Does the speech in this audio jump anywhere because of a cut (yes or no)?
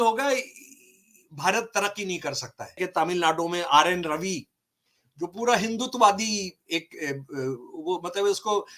yes